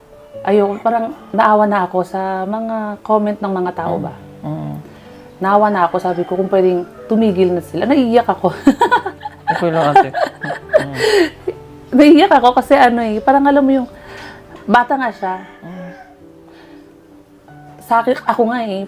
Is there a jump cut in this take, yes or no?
no